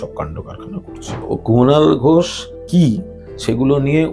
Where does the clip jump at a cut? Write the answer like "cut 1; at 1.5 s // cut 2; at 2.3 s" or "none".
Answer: cut 1; at 1.1 s // cut 2; at 2.5 s